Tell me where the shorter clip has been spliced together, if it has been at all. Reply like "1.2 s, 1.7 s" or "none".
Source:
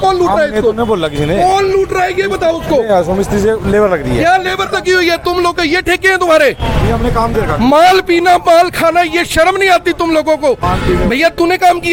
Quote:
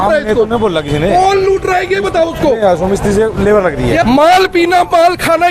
4.0 s